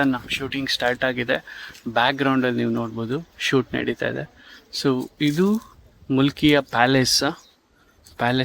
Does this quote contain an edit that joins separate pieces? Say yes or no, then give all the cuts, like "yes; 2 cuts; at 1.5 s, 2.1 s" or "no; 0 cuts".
no; 0 cuts